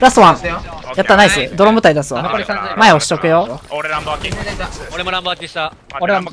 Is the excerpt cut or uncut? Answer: cut